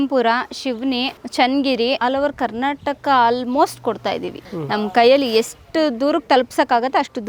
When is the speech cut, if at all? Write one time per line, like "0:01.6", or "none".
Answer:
0:01.2
0:02.0
0:04.4